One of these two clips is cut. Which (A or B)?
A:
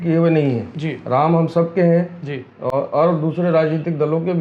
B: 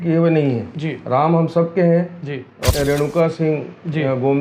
B